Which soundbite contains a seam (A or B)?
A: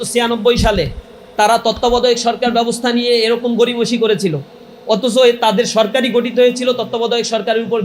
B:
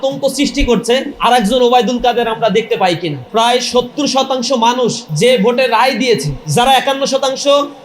B